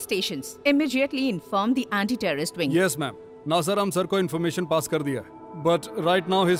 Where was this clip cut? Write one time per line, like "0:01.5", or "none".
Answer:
none